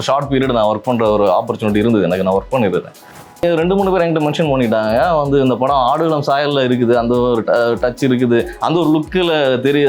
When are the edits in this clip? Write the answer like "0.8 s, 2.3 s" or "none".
3.4 s